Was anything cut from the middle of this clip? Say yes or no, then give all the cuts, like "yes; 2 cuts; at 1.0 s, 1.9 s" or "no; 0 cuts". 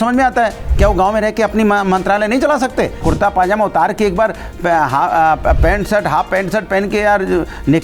yes; 1 cut; at 3.0 s